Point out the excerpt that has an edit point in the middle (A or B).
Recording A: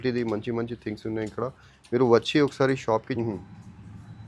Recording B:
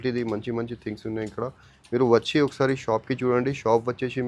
A